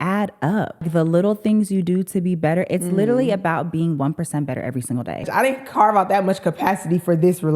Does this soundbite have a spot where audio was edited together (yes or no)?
yes